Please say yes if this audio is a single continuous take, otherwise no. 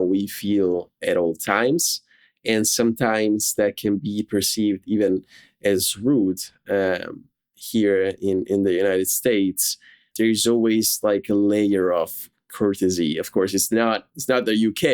no